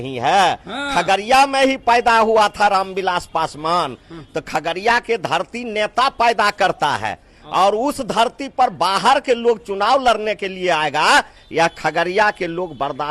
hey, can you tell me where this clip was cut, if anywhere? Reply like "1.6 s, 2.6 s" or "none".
none